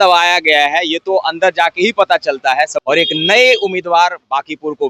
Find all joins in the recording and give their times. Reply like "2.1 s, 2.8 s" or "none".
2.8 s